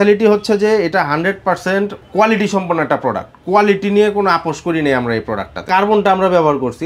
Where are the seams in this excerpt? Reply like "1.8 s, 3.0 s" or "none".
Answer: 2.0 s, 5.6 s